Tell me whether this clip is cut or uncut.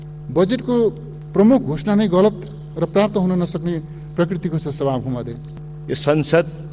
cut